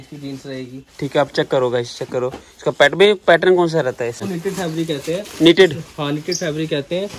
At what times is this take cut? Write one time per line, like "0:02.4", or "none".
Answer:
none

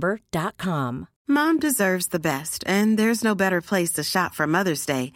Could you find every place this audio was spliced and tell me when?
0:01.1

